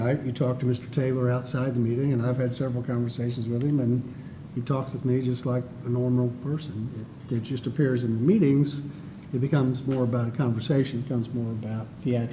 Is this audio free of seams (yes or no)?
yes